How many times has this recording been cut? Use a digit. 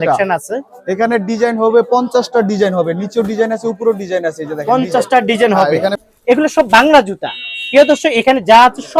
1